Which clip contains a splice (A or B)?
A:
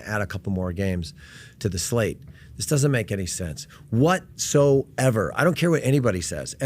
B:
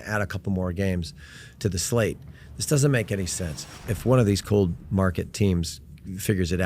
B